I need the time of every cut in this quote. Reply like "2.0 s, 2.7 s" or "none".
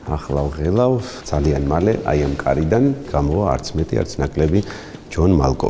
1.1 s, 3.1 s